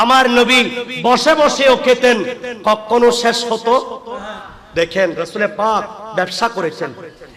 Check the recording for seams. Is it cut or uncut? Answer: uncut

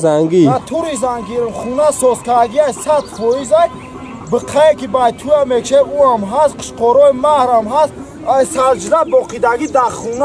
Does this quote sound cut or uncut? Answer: uncut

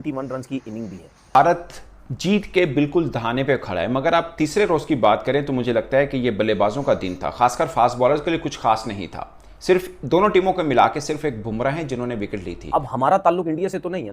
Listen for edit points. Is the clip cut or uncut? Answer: cut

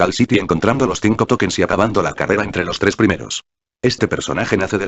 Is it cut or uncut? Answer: uncut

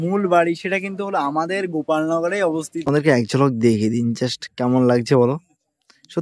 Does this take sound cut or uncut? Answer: cut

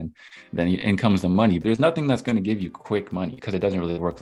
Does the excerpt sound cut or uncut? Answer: cut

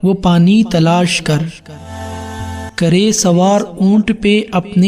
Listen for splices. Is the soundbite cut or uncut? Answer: cut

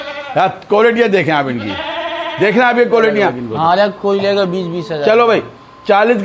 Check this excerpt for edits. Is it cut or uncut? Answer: cut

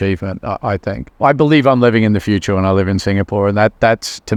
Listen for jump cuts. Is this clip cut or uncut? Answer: uncut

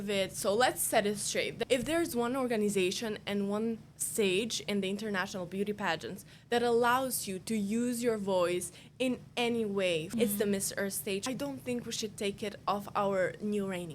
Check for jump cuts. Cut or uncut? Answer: cut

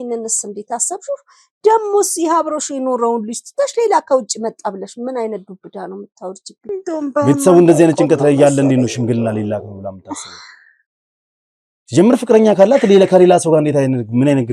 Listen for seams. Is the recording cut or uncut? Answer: cut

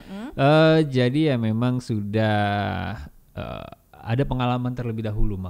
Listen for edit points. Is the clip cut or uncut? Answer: uncut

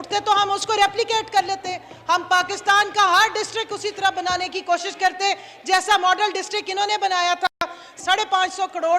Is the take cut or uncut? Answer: cut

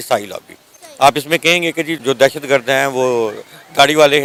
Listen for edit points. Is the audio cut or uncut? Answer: uncut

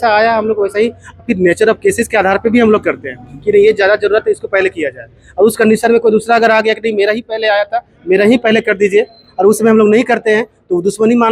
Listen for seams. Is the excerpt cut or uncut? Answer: uncut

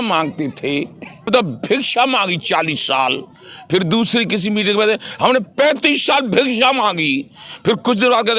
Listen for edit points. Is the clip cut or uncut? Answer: cut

